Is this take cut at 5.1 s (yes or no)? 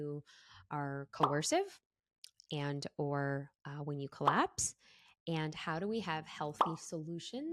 no